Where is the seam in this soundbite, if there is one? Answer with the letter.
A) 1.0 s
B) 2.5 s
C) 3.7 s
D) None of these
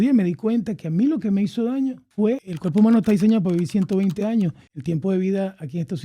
B